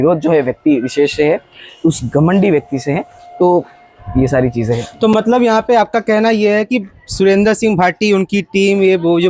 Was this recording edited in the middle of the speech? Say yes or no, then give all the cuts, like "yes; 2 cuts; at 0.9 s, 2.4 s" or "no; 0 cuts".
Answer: no; 0 cuts